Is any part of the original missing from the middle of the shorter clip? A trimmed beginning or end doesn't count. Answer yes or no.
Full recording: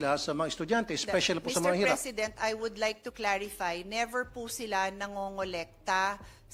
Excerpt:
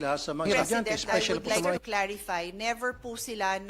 yes